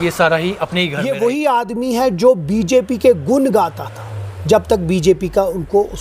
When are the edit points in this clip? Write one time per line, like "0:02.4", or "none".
0:01.0